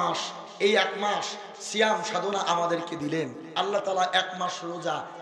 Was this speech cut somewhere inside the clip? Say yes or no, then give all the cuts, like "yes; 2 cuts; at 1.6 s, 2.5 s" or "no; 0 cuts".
yes; 1 cut; at 3.4 s